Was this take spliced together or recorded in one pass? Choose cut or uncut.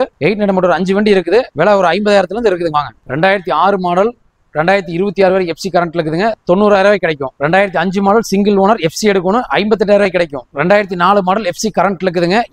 uncut